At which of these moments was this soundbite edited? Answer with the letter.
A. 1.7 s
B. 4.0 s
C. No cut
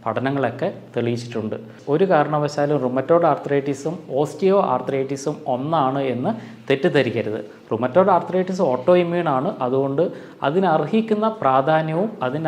A